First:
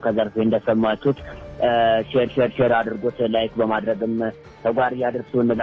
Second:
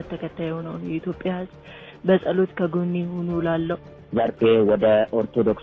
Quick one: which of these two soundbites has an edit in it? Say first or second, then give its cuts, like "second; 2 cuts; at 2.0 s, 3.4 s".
second; 1 cut; at 4.0 s